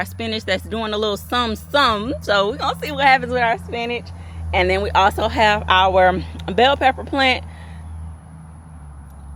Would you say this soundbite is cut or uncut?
uncut